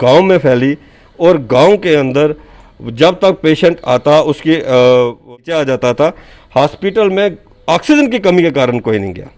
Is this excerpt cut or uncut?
cut